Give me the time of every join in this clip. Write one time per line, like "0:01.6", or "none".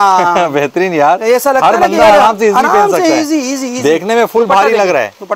none